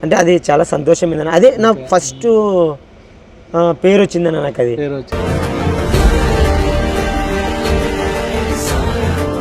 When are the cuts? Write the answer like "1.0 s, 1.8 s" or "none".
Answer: 5.0 s